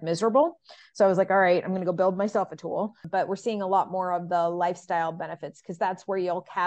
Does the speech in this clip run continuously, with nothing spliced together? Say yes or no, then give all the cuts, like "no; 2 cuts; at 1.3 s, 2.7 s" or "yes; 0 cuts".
no; 1 cut; at 3.0 s